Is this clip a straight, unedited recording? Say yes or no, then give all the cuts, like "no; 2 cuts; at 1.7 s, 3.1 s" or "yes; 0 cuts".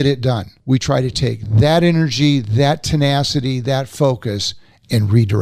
yes; 0 cuts